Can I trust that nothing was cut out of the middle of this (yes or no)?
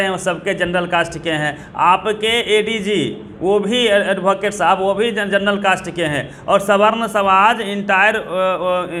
yes